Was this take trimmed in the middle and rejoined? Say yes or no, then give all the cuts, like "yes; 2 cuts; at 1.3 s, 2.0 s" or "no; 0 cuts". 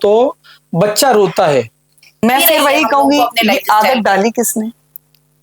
yes; 1 cut; at 2.2 s